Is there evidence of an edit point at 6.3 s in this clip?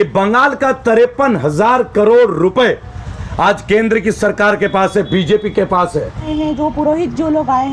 yes; 1 cut; at 6.3 s

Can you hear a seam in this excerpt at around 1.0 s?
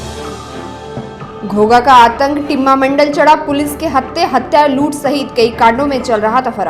yes; 1 cut; at 1.0 s

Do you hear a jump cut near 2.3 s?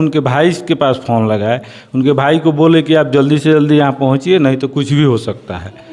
no; 0 cuts

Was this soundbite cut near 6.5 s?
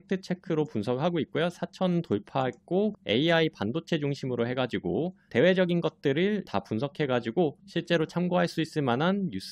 yes; 3 cuts; at 3.0 s, 5.3 s, 6.5 s

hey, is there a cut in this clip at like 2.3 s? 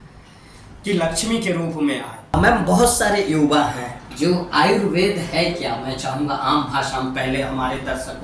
yes; 1 cut; at 2.3 s

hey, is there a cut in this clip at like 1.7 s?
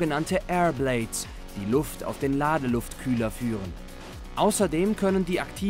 no; 1 cut; at 2.9 s

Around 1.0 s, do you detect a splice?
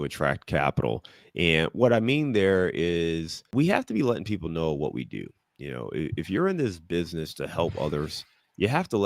no; 1 cut; at 3.3 s

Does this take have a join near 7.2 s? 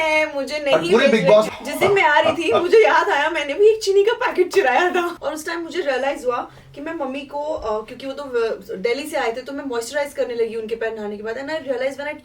no; 2 cuts; at 1.5 s, 5.2 s

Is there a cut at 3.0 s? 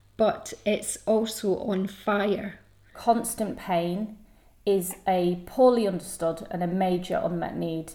yes; 1 cut; at 3.0 s

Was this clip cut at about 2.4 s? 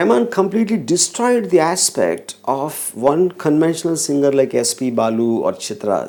no; 0 cuts

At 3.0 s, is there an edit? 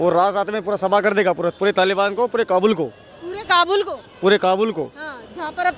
no; 0 cuts

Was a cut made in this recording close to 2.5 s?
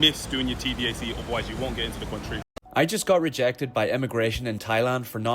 yes; 1 cut; at 2.5 s

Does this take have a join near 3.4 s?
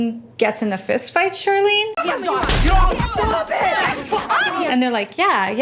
no; 2 cuts; at 2.0 s, 4.7 s

